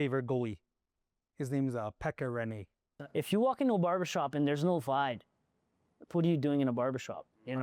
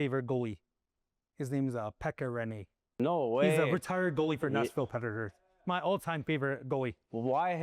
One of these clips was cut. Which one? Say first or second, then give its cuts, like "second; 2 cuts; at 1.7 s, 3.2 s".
first; 1 cut; at 2.9 s